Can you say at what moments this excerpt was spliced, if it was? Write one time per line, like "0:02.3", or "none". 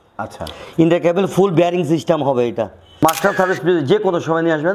0:02.8